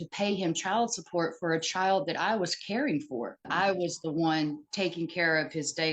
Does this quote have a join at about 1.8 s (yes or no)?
no